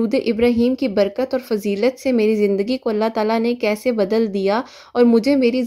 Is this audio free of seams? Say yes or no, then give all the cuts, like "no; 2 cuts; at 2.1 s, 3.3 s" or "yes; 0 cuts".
yes; 0 cuts